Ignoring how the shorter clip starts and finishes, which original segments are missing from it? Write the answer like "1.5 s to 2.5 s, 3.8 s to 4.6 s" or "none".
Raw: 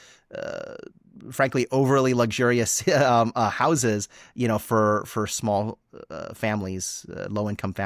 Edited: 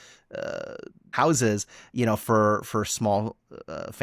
1.1 s to 3.5 s